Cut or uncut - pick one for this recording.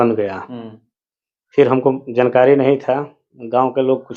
uncut